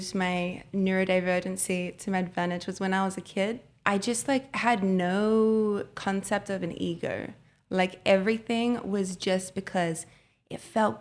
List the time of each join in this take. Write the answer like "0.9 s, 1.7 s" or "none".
3.7 s

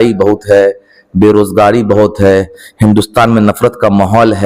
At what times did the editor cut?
none

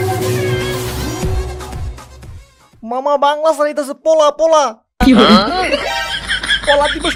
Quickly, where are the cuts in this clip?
none

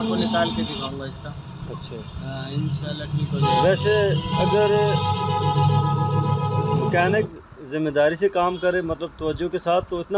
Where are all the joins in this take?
none

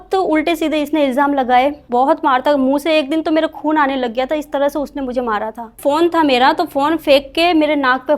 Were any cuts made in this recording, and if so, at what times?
1.8 s, 5.8 s

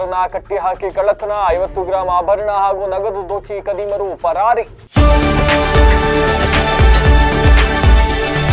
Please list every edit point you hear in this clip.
4.8 s

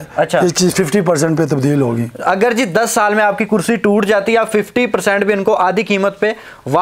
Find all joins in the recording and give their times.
none

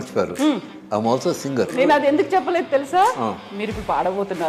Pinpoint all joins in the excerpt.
1.7 s

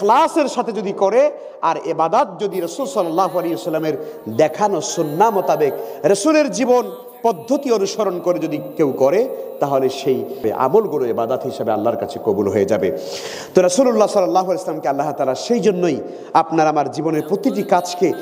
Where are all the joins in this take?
10.4 s

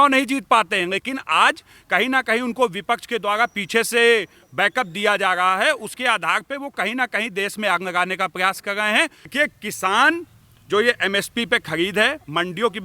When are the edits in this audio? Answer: 9.3 s

